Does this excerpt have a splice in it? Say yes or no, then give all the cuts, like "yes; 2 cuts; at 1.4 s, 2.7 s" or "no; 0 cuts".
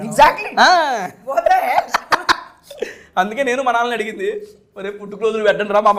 no; 0 cuts